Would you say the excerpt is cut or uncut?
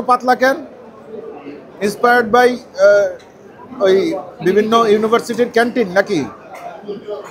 uncut